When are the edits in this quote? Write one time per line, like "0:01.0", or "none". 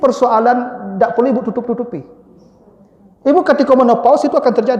none